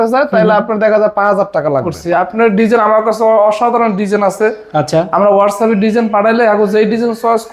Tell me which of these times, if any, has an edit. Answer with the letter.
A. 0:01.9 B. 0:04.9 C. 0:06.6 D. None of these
A